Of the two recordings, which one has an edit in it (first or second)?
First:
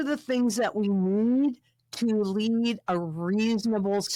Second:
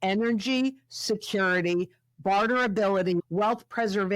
second